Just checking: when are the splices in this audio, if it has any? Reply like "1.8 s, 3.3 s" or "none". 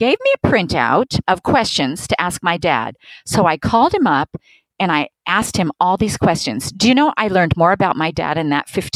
1.2 s